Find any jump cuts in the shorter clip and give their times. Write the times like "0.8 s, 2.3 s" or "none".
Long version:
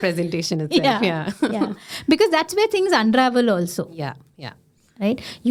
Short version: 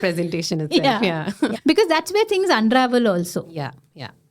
1.5 s